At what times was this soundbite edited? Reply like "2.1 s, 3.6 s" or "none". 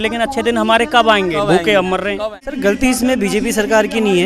2.6 s